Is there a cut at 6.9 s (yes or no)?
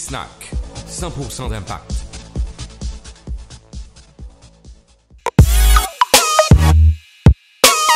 no